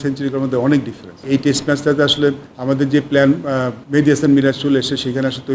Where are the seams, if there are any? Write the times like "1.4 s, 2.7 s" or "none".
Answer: 1.2 s, 2.5 s, 3.8 s